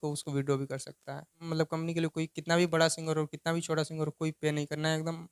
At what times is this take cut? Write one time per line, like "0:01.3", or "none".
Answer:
0:01.4